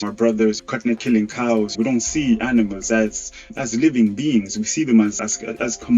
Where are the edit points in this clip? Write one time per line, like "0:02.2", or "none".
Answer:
0:01.7